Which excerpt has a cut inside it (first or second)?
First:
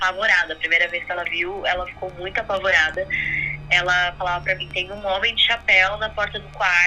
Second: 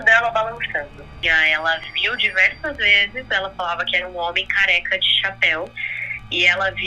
second